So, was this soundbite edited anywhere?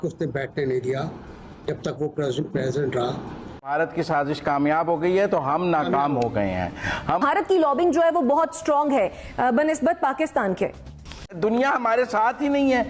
yes; 3 cuts; at 3.7 s, 7.2 s, 11.3 s

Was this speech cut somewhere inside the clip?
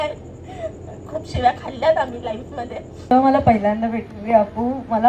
yes; 1 cut; at 3.1 s

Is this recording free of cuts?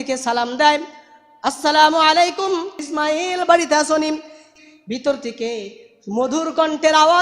no; 2 cuts; at 2.8 s, 4.5 s

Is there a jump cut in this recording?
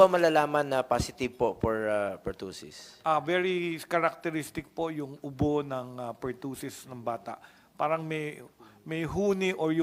no; 0 cuts

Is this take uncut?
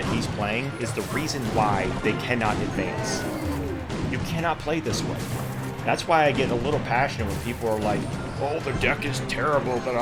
yes; 0 cuts

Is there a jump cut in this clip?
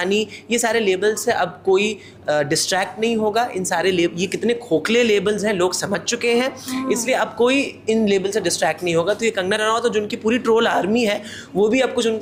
no; 0 cuts

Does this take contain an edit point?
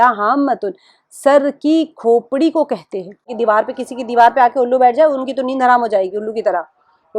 yes; 1 cut; at 3.3 s

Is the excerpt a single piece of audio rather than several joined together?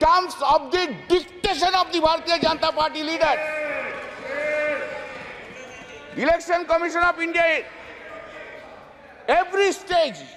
yes; 0 cuts

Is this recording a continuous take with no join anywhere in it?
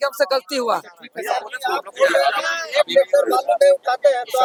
yes; 0 cuts

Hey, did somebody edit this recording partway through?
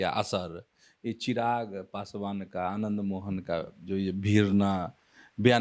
no; 0 cuts

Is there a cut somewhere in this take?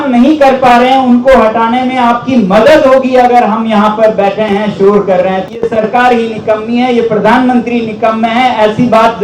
yes; 1 cut; at 5.4 s

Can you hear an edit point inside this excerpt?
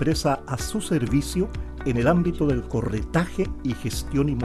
no; 0 cuts

